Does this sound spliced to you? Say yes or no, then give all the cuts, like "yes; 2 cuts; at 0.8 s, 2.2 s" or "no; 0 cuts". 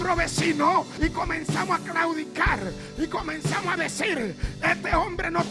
yes; 1 cut; at 0.9 s